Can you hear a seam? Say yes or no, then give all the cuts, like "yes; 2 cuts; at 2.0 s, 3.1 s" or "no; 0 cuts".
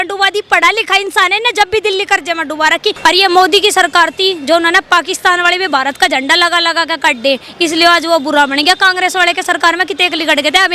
yes; 1 cut; at 3.0 s